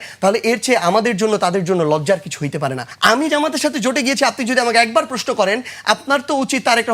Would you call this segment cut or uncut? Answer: cut